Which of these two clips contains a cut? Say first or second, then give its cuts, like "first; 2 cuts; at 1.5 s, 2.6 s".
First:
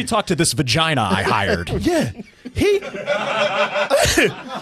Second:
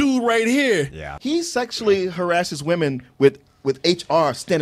second; 1 cut; at 1.1 s